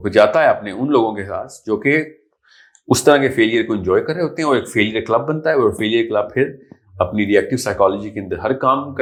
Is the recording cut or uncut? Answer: uncut